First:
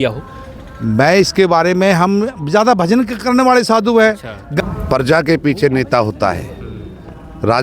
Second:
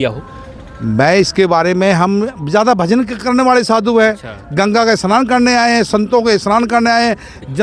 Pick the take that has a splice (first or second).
first